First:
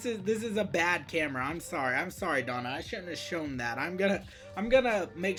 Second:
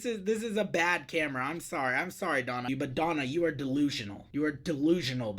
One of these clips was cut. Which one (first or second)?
second